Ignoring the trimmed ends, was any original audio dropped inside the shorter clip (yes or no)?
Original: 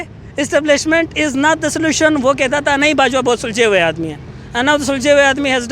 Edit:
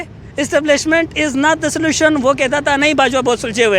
no